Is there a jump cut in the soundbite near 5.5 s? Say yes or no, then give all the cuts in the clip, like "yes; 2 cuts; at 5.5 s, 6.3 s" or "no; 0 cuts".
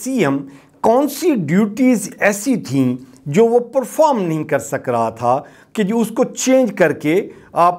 no; 0 cuts